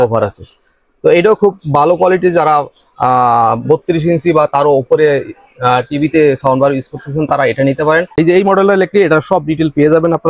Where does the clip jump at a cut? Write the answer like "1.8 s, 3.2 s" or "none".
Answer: 8.1 s